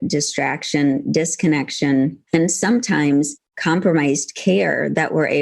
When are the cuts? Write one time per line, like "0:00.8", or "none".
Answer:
0:02.2

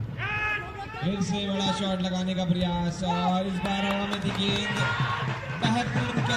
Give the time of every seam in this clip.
none

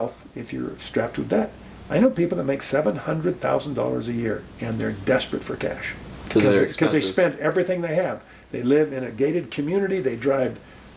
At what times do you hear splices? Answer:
none

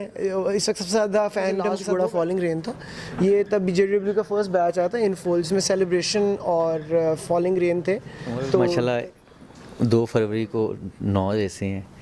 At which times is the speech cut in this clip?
0:01.8
0:08.7

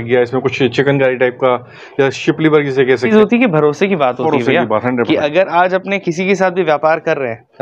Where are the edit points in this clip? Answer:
0:03.1

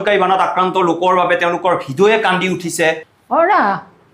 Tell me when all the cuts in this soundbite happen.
0:03.1

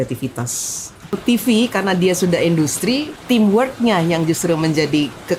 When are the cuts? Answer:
0:01.1
0:03.1

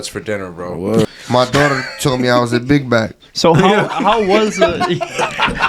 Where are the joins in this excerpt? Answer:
0:01.0

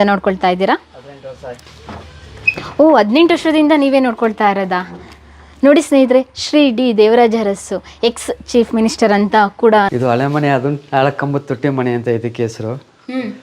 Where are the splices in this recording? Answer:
0:09.9

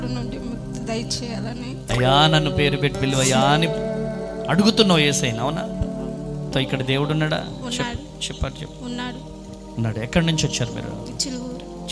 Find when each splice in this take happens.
0:06.5

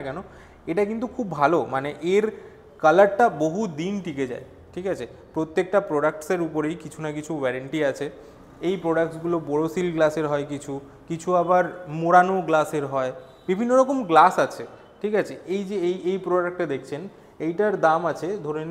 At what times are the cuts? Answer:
none

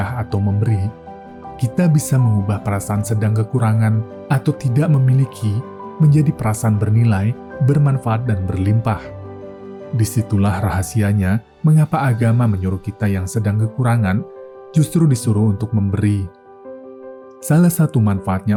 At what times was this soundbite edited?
none

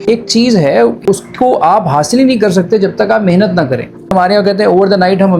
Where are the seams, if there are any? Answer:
0:01.0
0:04.1

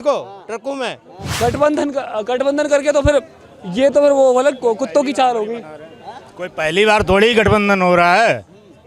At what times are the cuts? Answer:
0:01.3

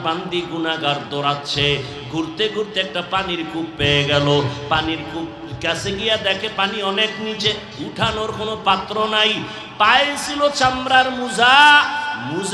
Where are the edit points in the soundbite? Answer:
none

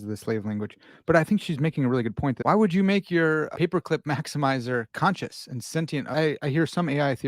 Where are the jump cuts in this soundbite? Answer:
0:02.4
0:03.5
0:04.9
0:06.1

